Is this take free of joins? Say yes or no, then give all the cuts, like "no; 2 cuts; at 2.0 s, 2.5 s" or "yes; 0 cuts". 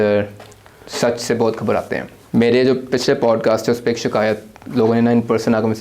no; 1 cut; at 2.1 s